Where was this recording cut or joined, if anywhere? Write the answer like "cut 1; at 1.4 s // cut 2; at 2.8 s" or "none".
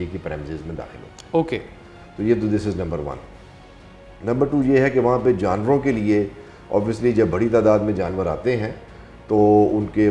none